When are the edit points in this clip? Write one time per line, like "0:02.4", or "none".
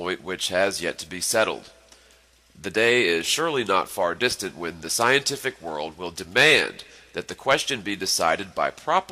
none